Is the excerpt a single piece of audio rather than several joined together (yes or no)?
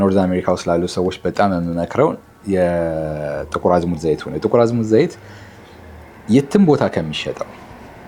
yes